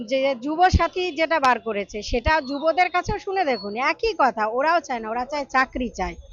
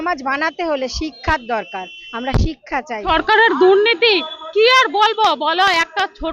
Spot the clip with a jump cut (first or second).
second